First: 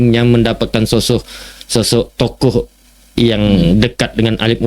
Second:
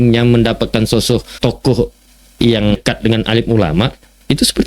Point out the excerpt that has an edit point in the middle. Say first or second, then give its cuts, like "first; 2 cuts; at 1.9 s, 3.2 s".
second; 2 cuts; at 1.3 s, 2.8 s